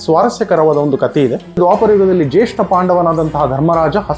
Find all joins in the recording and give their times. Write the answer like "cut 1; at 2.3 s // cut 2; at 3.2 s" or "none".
cut 1; at 1.6 s